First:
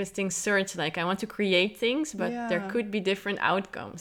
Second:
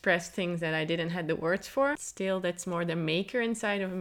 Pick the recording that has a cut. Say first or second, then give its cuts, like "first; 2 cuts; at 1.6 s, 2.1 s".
second; 1 cut; at 2.0 s